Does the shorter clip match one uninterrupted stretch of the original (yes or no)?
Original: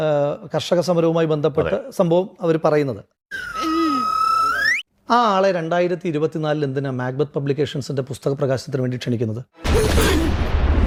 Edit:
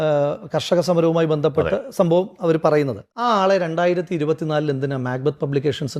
no